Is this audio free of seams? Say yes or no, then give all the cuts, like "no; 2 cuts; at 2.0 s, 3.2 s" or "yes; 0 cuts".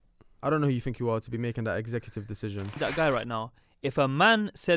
no; 1 cut; at 2.8 s